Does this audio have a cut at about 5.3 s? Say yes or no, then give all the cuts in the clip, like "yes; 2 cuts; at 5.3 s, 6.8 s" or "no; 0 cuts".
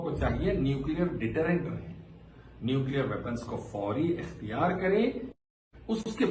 yes; 1 cut; at 5.3 s